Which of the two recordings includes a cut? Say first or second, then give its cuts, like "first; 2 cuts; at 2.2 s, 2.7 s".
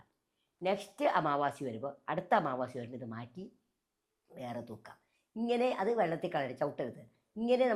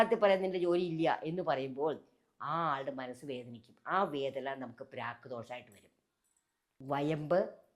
second; 1 cut; at 6.7 s